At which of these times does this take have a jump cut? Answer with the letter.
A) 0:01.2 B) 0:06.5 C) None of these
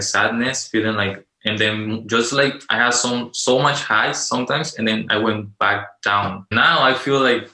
B